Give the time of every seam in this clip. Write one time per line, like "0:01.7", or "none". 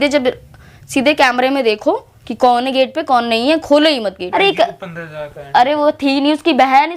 0:04.2